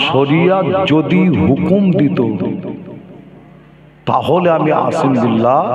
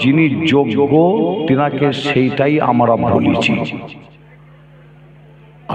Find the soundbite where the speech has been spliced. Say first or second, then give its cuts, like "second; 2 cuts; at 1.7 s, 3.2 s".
second; 1 cut; at 4.0 s